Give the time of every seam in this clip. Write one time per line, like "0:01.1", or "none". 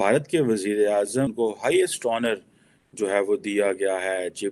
0:01.3